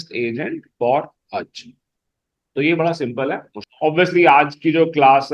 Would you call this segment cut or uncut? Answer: cut